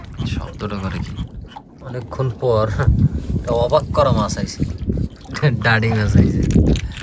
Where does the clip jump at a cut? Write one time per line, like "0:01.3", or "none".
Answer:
0:01.8